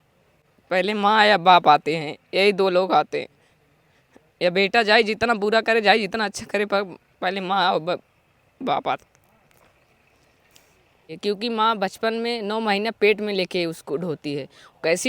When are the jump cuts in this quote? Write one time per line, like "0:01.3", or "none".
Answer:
0:11.1